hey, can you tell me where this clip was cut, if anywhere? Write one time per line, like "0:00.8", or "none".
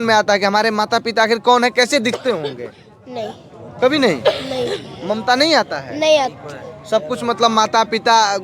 none